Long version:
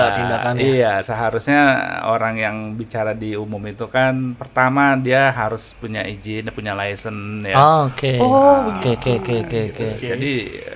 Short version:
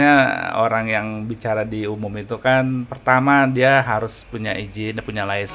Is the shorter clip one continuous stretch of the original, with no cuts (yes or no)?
yes